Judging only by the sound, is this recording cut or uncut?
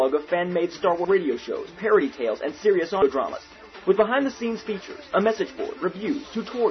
cut